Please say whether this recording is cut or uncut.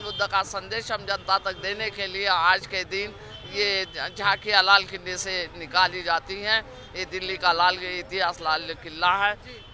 uncut